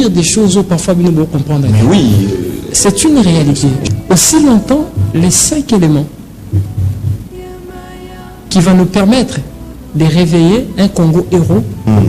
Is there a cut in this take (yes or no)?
yes